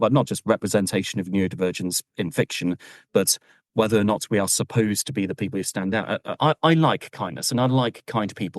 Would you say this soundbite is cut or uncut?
cut